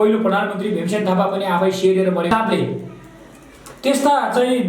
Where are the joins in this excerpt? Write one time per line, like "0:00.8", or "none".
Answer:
0:02.3